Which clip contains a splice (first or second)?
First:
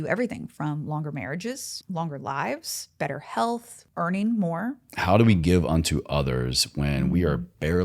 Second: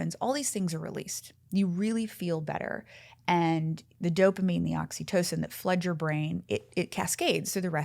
first